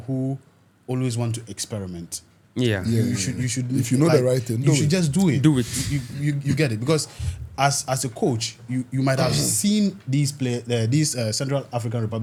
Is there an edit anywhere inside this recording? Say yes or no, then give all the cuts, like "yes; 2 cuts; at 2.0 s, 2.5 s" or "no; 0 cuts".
no; 0 cuts